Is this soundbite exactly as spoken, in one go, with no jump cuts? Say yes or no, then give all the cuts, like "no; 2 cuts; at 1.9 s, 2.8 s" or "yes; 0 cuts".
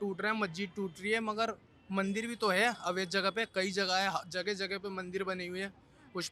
yes; 0 cuts